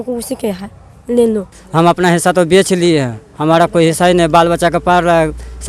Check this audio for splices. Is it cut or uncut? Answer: cut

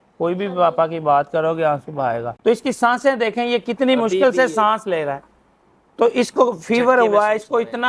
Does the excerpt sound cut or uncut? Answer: cut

